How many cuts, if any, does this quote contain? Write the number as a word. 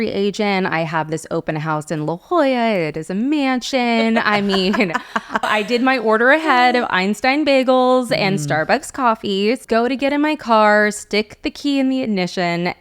two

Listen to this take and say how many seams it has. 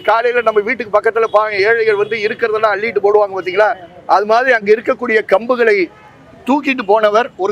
zero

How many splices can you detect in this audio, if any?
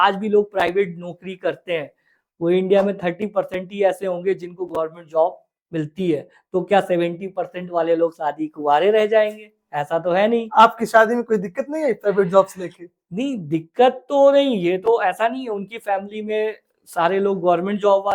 zero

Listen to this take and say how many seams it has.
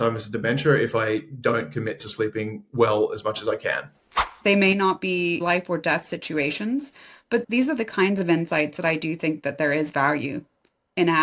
two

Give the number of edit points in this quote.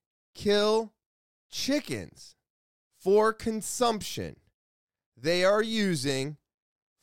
zero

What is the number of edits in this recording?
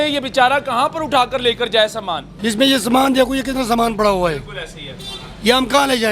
one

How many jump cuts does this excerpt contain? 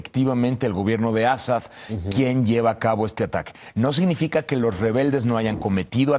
one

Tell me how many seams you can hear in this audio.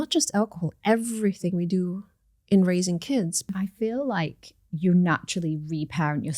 one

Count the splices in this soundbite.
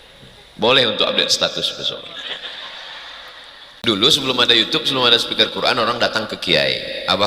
one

